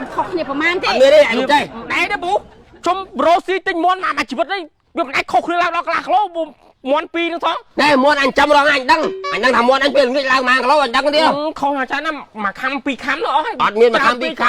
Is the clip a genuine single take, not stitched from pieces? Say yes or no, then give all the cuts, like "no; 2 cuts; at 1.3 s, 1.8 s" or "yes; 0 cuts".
yes; 0 cuts